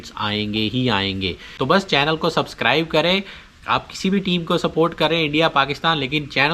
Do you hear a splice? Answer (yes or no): yes